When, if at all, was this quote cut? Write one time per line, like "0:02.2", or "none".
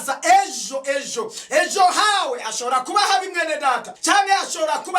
0:03.9